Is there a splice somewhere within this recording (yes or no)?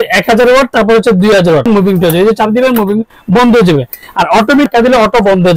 yes